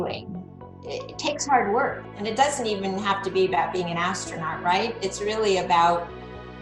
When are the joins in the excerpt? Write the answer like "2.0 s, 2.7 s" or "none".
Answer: 2.0 s